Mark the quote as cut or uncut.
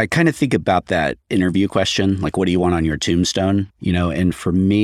cut